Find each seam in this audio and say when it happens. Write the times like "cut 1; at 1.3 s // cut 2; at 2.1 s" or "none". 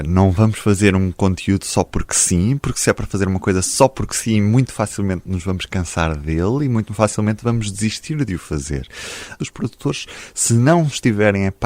cut 1; at 9.4 s